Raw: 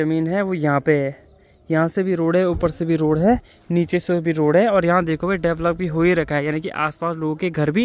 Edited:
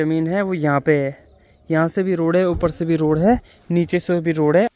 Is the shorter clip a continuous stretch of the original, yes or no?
yes